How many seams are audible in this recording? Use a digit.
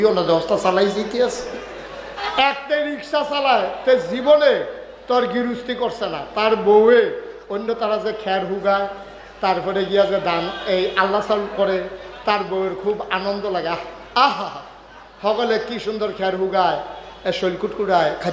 1